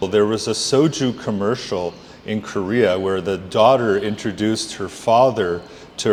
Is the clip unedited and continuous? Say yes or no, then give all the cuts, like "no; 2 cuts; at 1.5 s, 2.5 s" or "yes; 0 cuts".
yes; 0 cuts